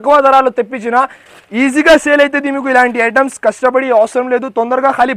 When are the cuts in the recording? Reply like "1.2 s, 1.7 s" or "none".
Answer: 1.2 s